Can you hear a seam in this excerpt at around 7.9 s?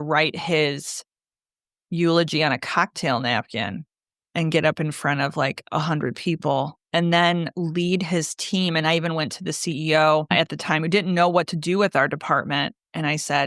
no; 1 cut; at 10.3 s

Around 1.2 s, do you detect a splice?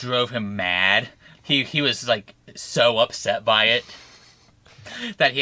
yes; 1 cut; at 1.2 s

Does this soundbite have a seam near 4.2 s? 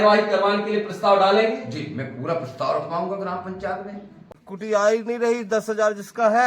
yes; 1 cut; at 4.2 s

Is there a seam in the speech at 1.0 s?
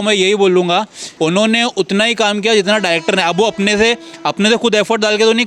yes; 1 cut; at 1.0 s

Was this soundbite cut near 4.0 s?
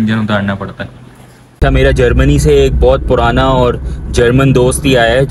no; 1 cut; at 1.4 s

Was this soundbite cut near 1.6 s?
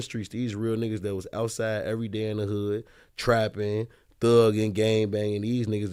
no; 0 cuts

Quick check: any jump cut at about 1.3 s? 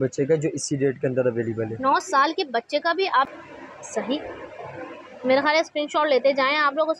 no; 1 cut; at 3.3 s

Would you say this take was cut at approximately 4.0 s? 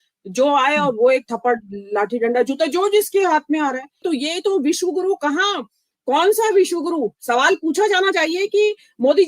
yes; 1 cut; at 4.0 s

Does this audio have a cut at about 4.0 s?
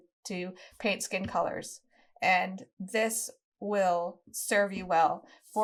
no; 0 cuts

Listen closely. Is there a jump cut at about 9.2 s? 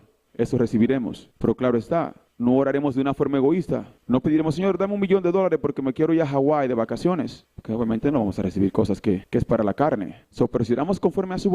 yes; 1 cut; at 9.2 s

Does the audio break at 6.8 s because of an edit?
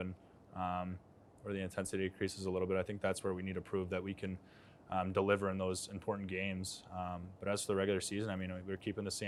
no; 0 cuts

